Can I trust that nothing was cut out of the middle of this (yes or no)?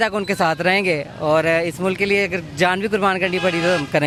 yes